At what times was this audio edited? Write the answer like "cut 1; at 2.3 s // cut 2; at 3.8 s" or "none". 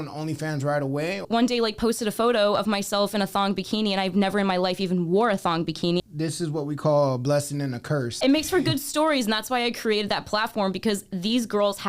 cut 1; at 1.2 s // cut 2; at 6.0 s // cut 3; at 8.1 s